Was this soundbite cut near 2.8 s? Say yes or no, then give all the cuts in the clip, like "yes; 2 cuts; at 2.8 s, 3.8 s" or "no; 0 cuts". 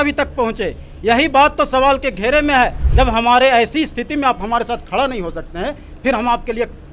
yes; 1 cut; at 2.8 s